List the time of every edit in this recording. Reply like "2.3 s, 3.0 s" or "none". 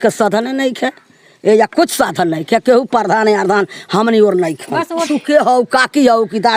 5.1 s